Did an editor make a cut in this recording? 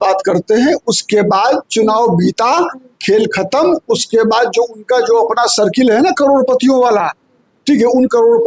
no; 0 cuts

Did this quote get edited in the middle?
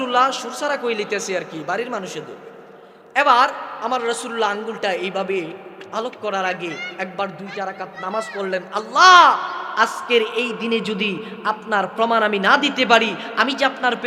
no; 0 cuts

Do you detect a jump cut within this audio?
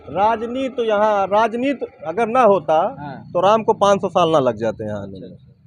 no; 0 cuts

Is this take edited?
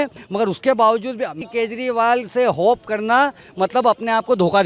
no; 0 cuts

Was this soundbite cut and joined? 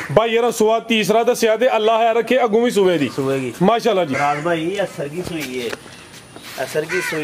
no; 0 cuts

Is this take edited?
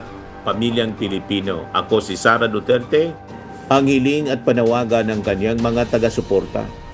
yes; 1 cut; at 3.3 s

